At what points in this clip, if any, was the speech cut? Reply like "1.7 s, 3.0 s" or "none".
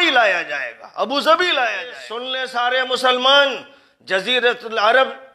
2.4 s